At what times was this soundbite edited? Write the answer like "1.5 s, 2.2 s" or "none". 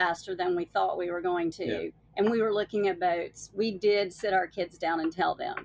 none